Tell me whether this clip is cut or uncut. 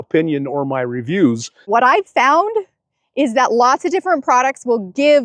cut